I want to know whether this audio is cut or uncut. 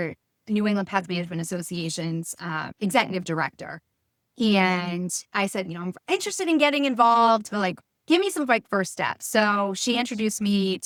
uncut